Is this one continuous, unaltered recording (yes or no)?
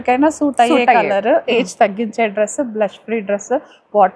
yes